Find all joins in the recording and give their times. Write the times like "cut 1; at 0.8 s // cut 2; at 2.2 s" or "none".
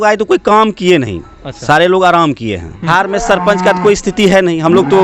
cut 1; at 2.9 s